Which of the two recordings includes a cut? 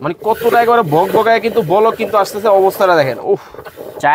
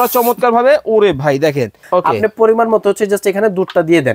second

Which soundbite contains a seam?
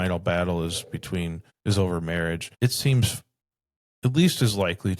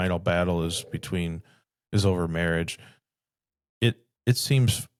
first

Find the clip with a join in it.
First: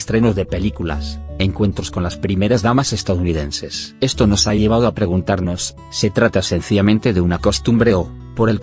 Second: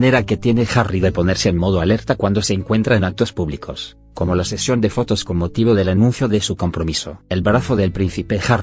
first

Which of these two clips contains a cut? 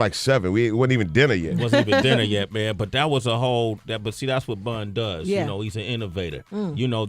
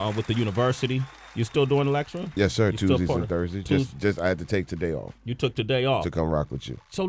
first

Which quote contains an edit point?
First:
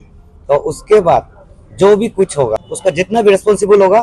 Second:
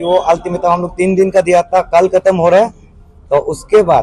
first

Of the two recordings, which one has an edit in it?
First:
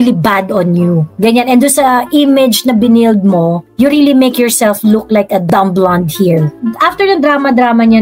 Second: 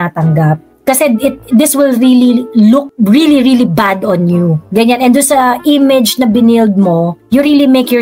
first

